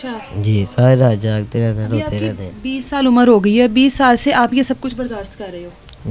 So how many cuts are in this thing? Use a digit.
0